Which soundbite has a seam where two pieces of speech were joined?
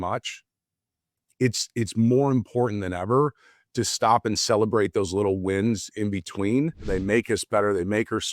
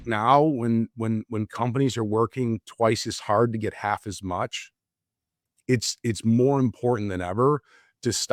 first; 1 cut; at 6.9 s

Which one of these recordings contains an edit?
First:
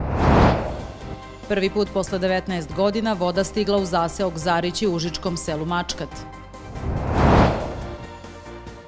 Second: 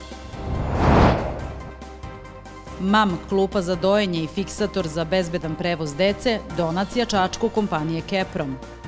first; 1 cut; at 0.9 s

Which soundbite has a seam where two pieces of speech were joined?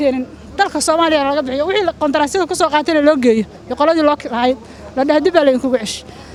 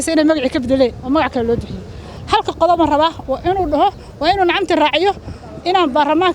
second; 1 cut; at 2.1 s

